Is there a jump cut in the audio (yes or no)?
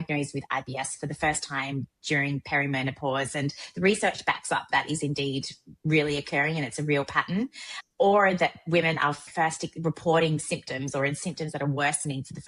yes